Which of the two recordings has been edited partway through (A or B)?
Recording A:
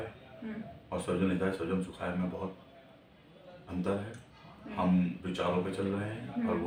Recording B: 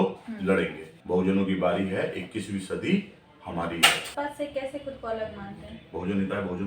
B